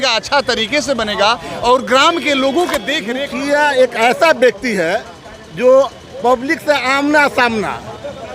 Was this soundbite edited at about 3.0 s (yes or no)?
yes